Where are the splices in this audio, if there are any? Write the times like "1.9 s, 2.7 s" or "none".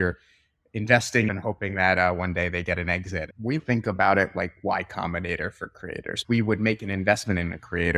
1.3 s, 3.6 s, 6.2 s